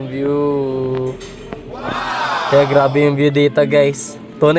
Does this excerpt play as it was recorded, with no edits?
no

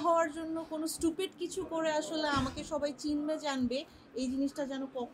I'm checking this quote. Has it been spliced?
no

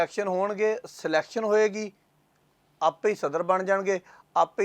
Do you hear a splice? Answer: no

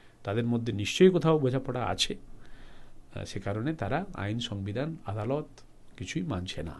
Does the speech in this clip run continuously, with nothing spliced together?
yes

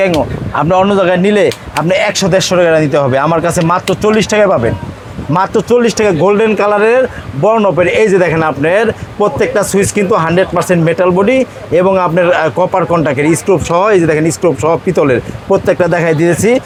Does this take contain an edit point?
no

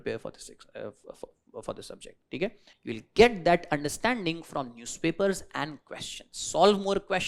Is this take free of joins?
no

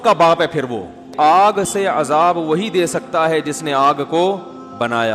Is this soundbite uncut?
no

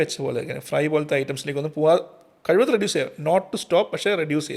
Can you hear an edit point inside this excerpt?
no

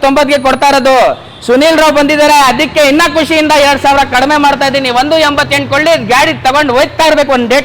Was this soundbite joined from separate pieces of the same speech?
no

